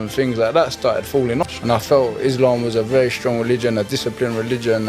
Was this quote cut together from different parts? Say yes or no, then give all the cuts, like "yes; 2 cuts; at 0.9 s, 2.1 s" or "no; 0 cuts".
yes; 1 cut; at 1.5 s